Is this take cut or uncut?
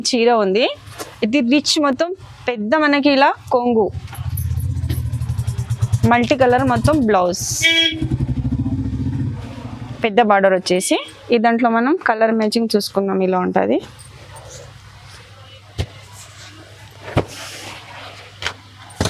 uncut